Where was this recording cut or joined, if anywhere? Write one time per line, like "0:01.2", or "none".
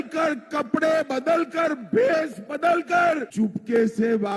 0:03.3